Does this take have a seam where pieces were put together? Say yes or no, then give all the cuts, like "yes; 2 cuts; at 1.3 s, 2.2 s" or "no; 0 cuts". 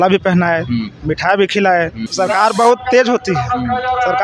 yes; 1 cut; at 2.0 s